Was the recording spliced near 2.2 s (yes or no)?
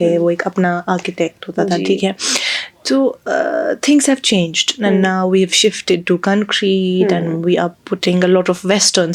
no